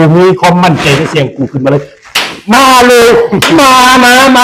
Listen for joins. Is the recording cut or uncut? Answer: uncut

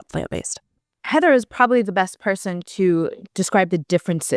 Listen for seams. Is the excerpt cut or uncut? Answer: uncut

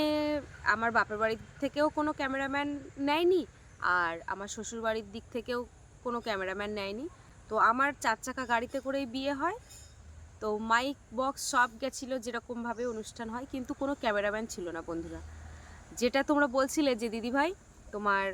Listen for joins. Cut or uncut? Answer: uncut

